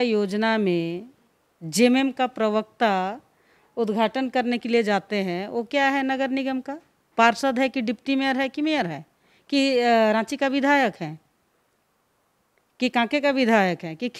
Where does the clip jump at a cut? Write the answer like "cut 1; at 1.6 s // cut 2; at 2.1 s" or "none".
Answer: none

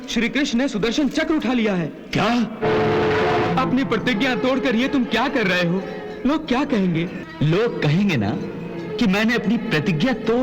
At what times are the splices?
cut 1; at 3.5 s // cut 2; at 7.2 s

